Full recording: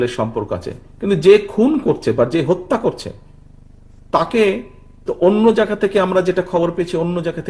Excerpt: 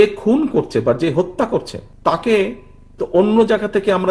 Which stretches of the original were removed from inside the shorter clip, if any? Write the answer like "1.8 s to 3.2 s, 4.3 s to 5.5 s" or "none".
3.1 s to 3.9 s